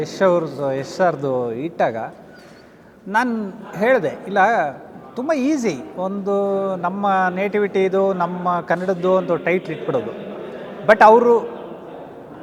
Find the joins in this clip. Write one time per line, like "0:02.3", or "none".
none